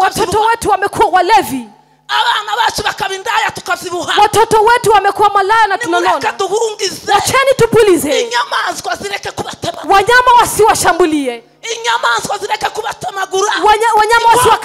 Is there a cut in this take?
no; 0 cuts

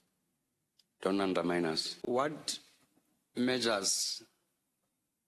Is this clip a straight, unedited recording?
no; 1 cut; at 1.9 s

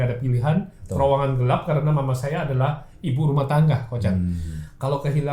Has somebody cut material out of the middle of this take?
no; 0 cuts

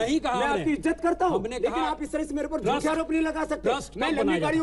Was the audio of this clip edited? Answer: no; 0 cuts

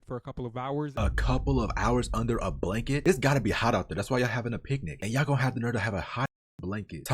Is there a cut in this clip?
yes; 1 cut; at 1.0 s

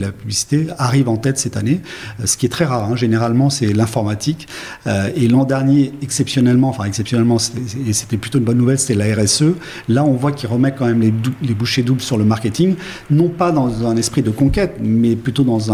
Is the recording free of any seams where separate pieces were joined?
yes; 0 cuts

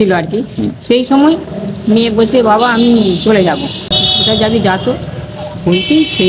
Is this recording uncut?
no; 1 cut; at 4.0 s

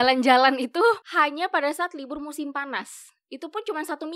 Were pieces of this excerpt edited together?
yes; 1 cut; at 1.1 s

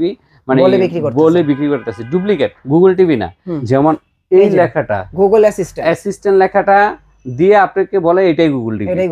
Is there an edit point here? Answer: yes; 1 cut; at 3.5 s

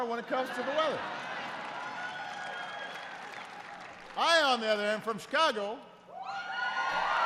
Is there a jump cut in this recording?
no; 0 cuts

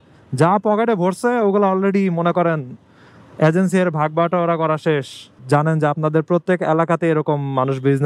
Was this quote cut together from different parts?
yes; 1 cut; at 5.3 s

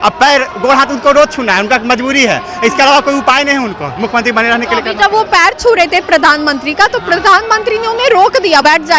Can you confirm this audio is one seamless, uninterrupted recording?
yes; 0 cuts

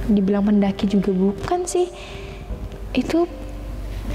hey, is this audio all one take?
yes; 0 cuts

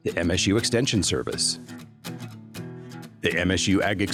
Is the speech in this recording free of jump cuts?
yes; 0 cuts

